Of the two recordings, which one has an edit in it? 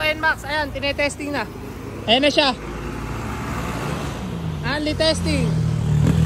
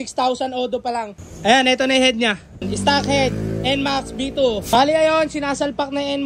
second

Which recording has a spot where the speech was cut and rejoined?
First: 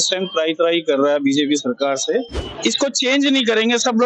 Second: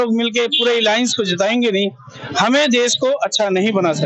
first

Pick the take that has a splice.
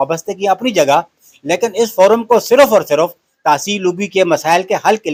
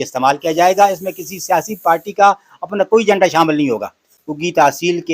second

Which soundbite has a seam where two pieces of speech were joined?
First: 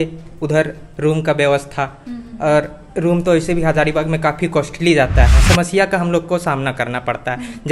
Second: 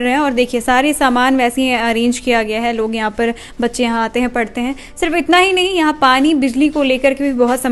first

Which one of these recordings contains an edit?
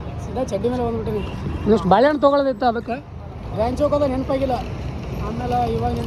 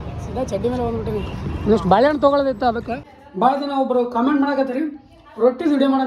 second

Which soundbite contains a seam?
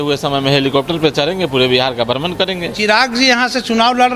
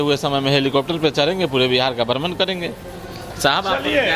first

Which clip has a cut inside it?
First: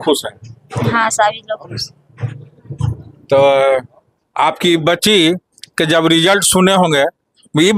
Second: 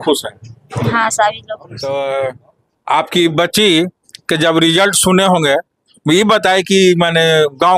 second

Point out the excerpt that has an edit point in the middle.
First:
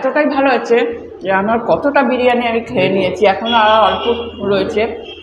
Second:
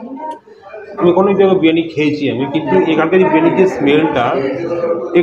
second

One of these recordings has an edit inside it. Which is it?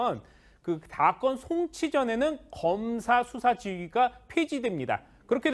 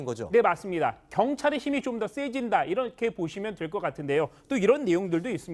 first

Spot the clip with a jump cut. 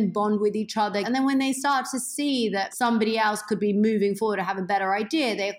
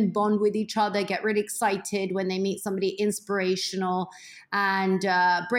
first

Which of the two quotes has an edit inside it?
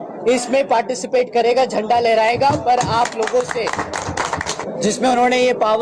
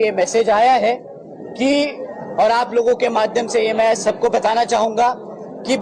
first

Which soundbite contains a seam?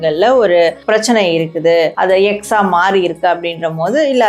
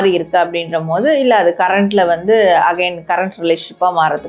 first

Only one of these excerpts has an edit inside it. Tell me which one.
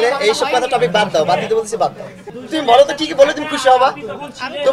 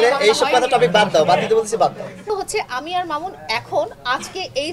second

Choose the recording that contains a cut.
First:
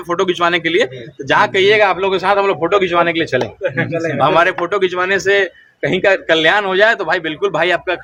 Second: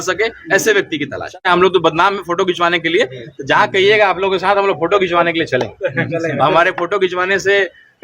second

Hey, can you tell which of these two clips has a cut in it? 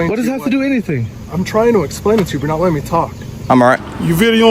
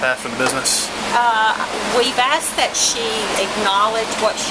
first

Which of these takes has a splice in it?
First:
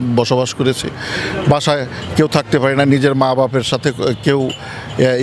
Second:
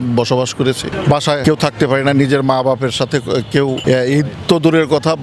second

